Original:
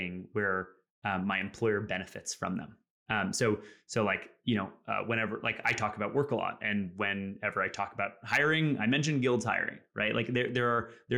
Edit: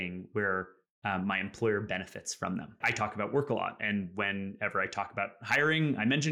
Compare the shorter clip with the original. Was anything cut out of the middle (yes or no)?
yes